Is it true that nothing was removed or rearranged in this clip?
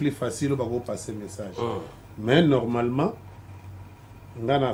yes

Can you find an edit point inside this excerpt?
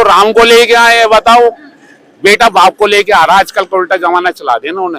no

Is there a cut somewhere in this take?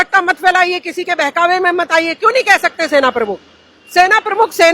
no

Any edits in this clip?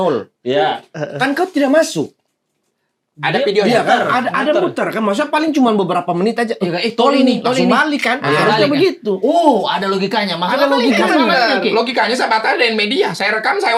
no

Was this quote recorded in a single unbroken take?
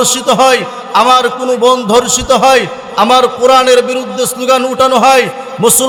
yes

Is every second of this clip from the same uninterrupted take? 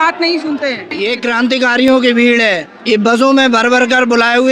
no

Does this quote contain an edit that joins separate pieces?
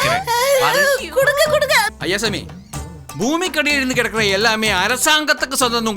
yes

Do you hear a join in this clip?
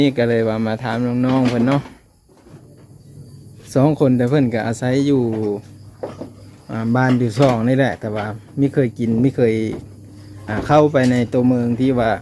no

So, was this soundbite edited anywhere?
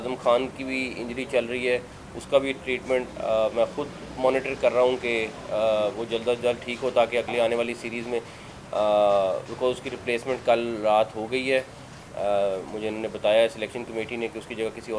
no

